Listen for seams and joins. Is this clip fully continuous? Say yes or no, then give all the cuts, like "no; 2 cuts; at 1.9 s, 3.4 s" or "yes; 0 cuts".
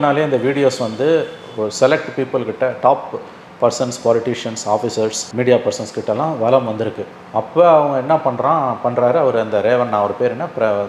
yes; 0 cuts